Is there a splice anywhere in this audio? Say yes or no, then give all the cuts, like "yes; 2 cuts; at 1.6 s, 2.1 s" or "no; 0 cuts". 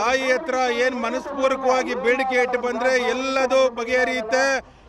no; 0 cuts